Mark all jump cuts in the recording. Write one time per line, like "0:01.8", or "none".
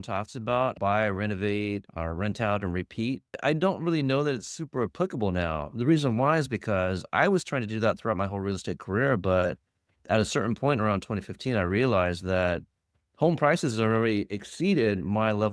0:00.8
0:01.9
0:03.4